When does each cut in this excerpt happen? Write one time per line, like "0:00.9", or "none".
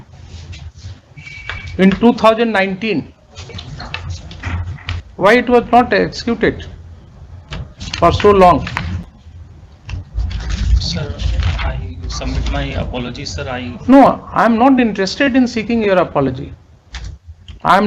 0:05.0